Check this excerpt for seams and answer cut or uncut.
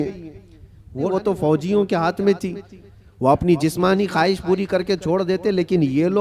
cut